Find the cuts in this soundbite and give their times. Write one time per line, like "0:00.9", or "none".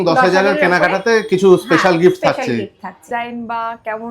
0:03.0